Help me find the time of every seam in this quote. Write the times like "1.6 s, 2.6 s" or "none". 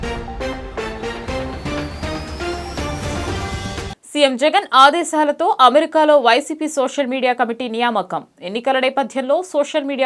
3.9 s

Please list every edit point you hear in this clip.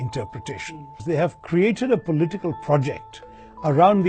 0.9 s

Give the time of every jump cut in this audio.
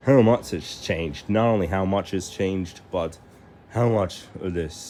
none

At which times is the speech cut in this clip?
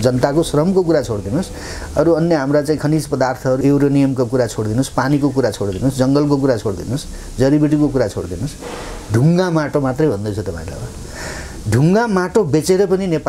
3.6 s

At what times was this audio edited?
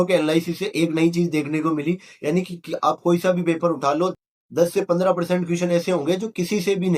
none

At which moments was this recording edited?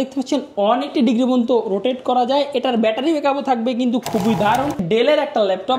4.8 s

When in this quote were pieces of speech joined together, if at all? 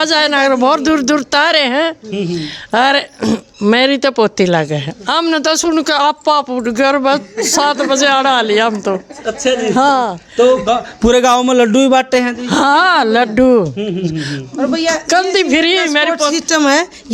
none

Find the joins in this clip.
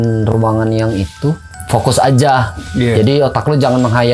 1.5 s

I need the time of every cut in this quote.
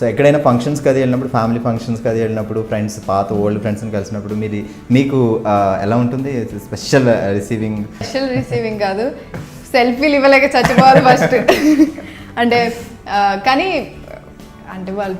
8.1 s

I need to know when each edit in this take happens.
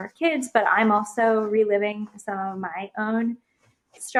none

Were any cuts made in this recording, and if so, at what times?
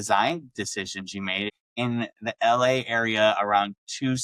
1.6 s

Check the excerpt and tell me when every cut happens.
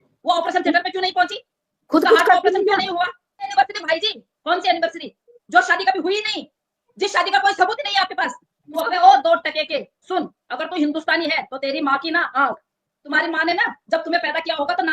3.4 s, 8.7 s, 12.9 s

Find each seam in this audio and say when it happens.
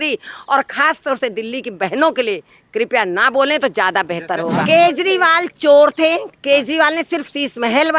4.6 s

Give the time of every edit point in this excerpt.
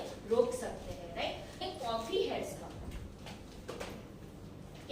1.6 s

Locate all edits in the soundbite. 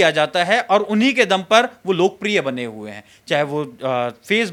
none

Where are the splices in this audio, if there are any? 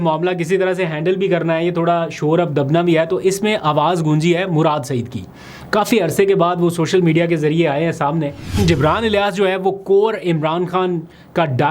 8.6 s

